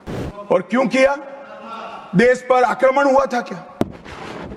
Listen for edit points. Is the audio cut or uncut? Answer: uncut